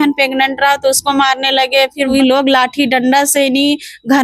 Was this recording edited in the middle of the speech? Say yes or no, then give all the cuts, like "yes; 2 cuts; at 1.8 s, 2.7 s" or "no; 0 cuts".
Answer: yes; 1 cut; at 2.1 s